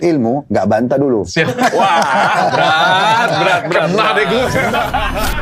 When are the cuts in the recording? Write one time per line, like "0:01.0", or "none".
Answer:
none